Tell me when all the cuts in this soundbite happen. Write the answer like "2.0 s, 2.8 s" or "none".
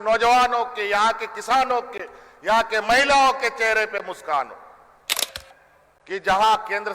5.3 s